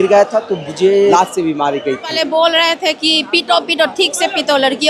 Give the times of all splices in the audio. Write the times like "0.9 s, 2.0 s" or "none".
1.1 s, 2.1 s